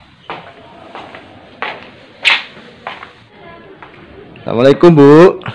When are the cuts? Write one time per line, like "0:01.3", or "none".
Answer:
0:03.3